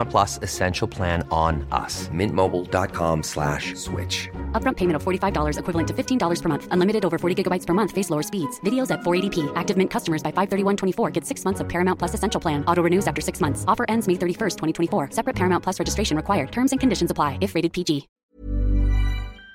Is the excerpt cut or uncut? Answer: cut